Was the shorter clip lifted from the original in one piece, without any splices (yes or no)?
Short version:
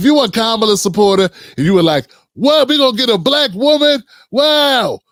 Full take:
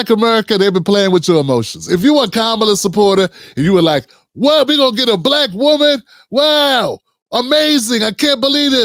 yes